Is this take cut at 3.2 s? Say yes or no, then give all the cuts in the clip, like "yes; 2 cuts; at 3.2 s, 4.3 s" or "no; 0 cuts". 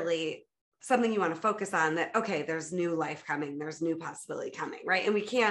no; 0 cuts